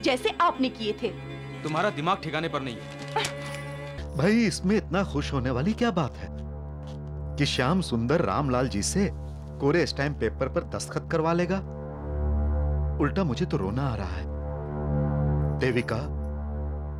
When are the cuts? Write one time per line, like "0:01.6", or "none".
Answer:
0:03.9